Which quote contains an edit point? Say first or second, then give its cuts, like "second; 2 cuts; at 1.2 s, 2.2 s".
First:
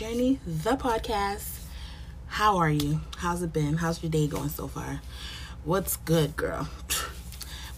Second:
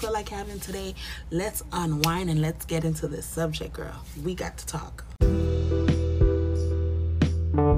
second; 1 cut; at 5.2 s